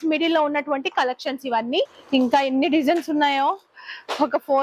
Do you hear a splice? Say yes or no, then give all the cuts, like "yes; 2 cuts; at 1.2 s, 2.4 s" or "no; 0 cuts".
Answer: yes; 1 cut; at 2.0 s